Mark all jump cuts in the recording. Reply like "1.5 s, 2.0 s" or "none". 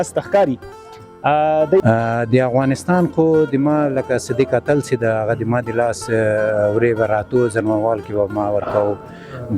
1.8 s